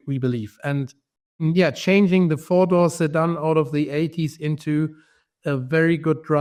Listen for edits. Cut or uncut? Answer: uncut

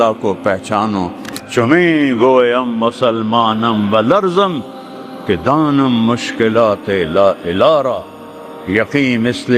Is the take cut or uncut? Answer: cut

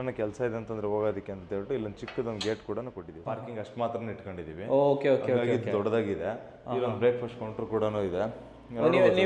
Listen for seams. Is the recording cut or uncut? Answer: cut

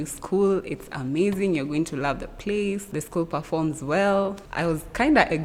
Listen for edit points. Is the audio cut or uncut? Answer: uncut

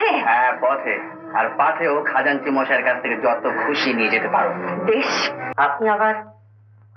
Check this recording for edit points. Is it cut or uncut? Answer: cut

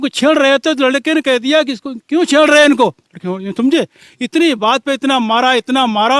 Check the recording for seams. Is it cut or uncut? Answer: uncut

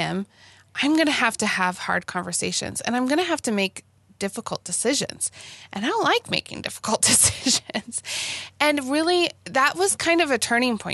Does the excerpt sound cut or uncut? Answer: uncut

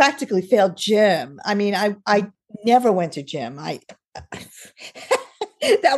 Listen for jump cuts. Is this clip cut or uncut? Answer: uncut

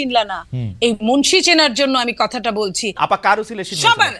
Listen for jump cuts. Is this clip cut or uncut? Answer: cut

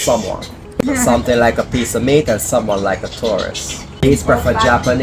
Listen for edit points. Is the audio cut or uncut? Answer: cut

